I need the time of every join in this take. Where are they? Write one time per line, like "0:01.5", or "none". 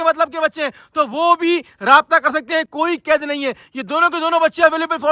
none